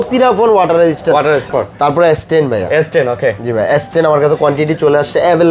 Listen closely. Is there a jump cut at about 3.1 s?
no; 1 cut; at 1.5 s

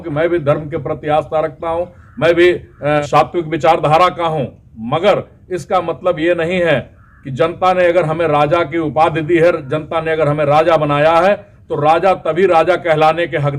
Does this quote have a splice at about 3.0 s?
yes; 1 cut; at 3.0 s

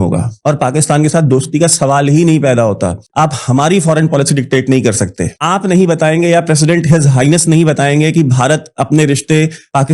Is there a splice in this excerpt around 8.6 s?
no; 1 cut; at 3.0 s

